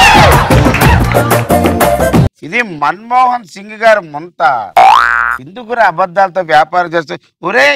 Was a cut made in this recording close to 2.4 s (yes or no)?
yes